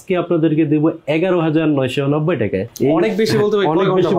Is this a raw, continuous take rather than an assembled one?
no; 1 cut; at 2.7 s

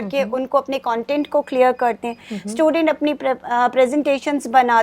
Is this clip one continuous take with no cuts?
yes; 0 cuts

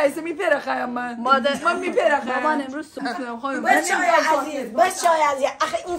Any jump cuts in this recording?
yes; 1 cut; at 3.1 s

